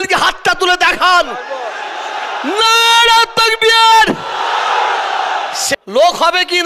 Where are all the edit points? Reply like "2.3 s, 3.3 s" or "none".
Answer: 5.6 s